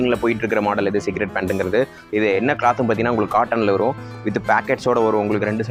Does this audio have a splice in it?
no; 0 cuts

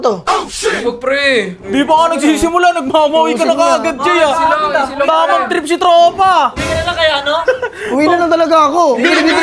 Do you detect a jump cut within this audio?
no; 0 cuts

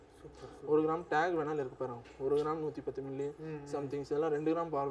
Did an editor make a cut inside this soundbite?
no; 0 cuts

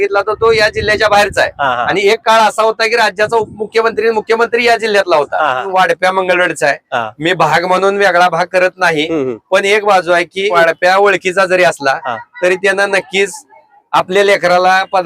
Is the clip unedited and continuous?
no; 2 cuts; at 5.6 s, 10.5 s

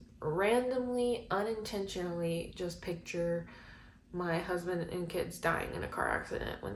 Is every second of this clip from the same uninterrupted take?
yes; 0 cuts

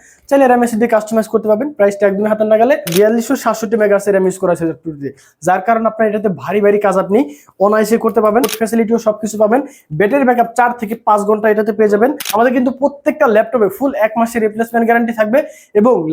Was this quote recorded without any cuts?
no; 3 cuts; at 2.9 s, 8.5 s, 12.2 s

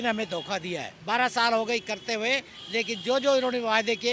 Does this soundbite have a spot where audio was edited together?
yes; 1 cut; at 0.9 s

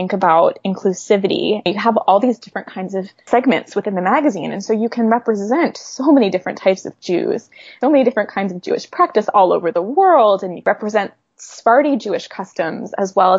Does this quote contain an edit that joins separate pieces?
yes; 1 cut; at 1.7 s

